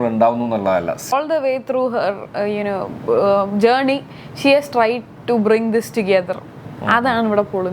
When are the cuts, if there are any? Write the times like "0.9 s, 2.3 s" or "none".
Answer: 1.1 s